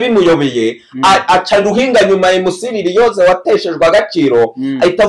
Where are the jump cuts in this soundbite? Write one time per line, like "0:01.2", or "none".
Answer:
none